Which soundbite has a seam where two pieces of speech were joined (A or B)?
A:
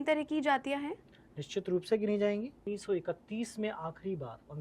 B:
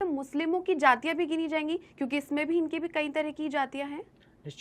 A